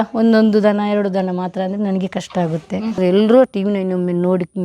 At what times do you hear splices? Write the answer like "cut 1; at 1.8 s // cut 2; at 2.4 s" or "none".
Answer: cut 1; at 2.9 s